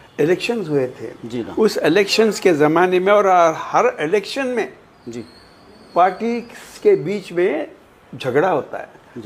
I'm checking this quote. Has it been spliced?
no; 0 cuts

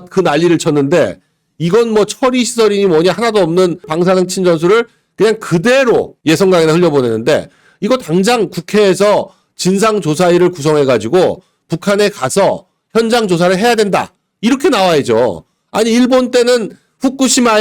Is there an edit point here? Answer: yes; 2 cuts; at 3.9 s, 6.1 s

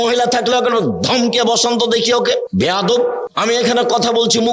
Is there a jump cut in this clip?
yes; 2 cuts; at 2.5 s, 3.3 s

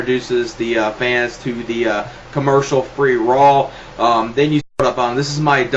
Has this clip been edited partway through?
no; 0 cuts

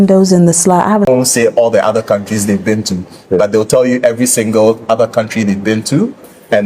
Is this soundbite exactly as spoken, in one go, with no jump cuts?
no; 1 cut; at 1.1 s

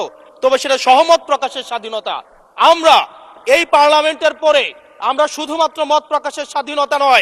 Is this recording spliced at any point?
no; 0 cuts

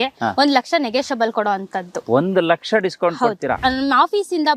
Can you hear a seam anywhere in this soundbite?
yes; 1 cut; at 3.6 s

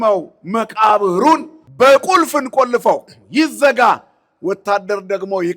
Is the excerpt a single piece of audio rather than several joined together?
no; 1 cut; at 1.6 s

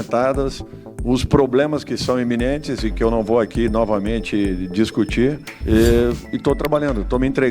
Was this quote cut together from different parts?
yes; 1 cut; at 5.5 s

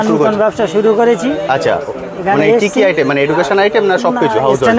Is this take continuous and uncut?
yes; 0 cuts

